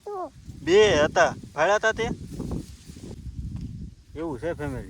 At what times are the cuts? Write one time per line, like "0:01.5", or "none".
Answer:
0:03.1